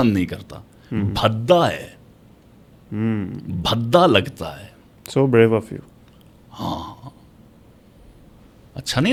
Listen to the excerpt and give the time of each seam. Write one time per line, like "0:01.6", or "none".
none